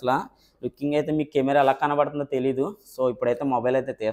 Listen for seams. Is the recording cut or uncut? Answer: uncut